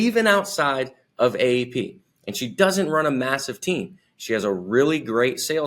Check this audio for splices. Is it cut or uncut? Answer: uncut